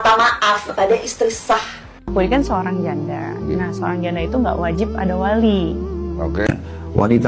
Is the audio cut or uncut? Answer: cut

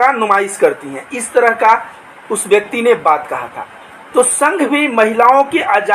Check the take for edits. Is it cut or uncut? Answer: uncut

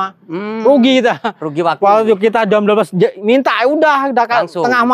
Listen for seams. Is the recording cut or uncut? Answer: uncut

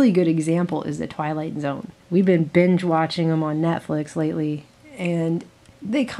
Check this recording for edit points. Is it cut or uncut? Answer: uncut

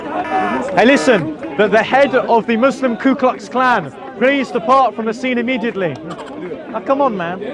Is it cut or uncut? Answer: uncut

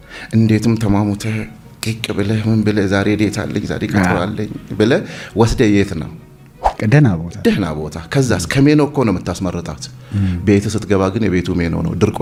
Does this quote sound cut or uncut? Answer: uncut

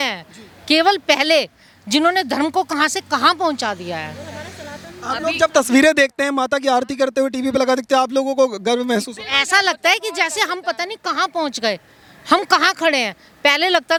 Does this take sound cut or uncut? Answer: uncut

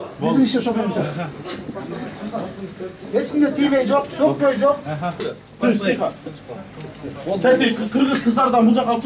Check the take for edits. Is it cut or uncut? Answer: cut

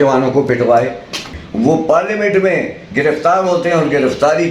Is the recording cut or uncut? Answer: cut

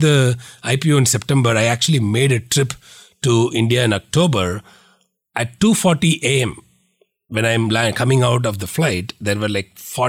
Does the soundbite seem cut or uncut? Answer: uncut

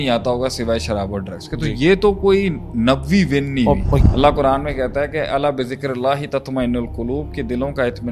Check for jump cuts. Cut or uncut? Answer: cut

